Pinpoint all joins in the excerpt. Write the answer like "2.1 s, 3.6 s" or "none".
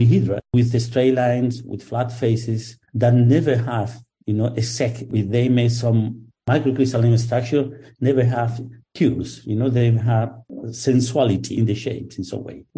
5.0 s, 11.5 s